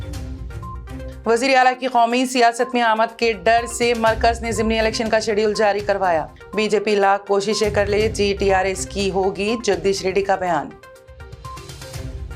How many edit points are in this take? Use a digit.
1